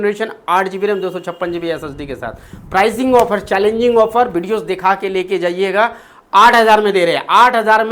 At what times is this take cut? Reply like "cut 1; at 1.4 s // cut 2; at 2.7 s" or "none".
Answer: none